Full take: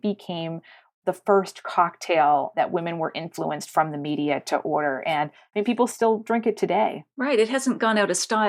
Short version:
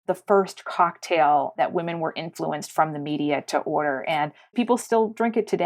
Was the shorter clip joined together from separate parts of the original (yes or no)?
yes